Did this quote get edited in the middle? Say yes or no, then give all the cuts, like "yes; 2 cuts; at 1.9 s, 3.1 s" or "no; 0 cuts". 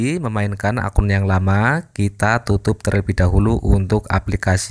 no; 0 cuts